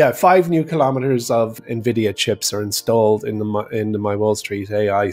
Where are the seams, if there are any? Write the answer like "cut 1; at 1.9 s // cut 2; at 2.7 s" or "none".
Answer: cut 1; at 1.6 s